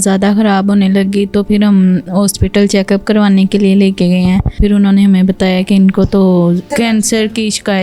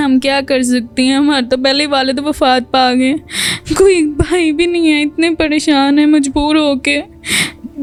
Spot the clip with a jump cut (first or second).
first